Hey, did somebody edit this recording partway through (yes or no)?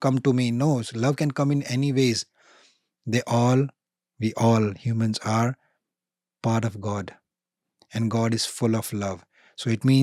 no